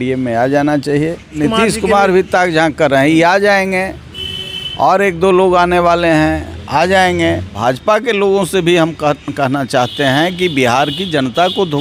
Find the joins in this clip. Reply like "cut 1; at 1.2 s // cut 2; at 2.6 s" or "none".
cut 1; at 1.4 s // cut 2; at 7.5 s